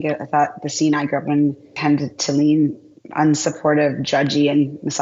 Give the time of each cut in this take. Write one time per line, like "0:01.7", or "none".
0:01.7